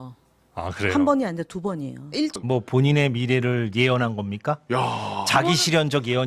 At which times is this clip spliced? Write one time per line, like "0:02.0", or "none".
0:02.4